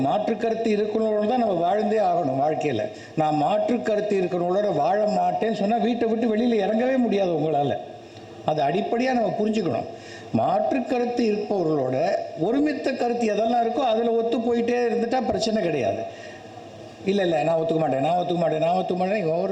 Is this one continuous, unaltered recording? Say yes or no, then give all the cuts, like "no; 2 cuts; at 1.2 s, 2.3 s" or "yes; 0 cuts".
yes; 0 cuts